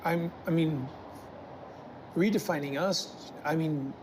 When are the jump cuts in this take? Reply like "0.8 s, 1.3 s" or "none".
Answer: none